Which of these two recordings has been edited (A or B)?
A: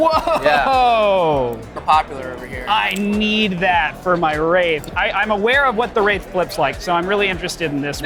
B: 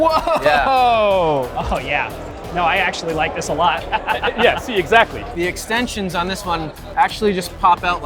B